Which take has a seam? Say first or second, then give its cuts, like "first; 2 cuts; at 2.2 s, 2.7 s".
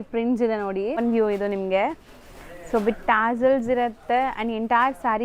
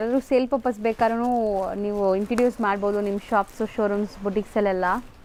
first; 1 cut; at 1.0 s